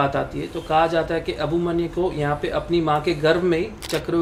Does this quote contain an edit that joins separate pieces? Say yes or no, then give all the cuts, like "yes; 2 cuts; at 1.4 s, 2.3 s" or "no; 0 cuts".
no; 0 cuts